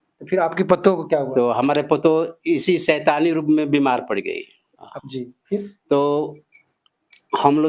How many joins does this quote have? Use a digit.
1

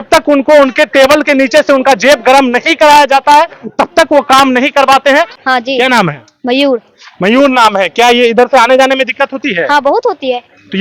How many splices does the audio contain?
1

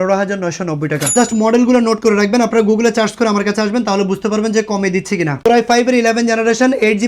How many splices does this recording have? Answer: 1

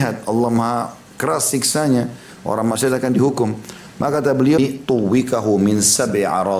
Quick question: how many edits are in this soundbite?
1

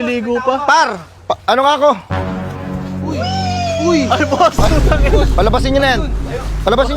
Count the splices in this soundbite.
0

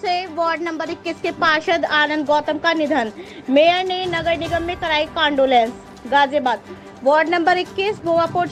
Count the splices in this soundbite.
0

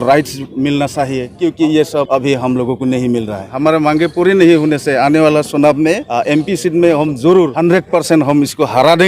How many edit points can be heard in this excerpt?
5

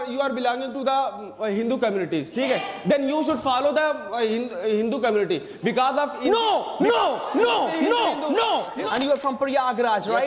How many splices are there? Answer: 1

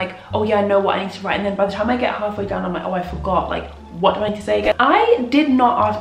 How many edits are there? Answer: 1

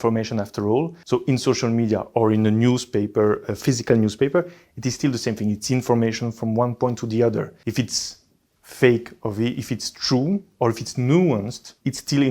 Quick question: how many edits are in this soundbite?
2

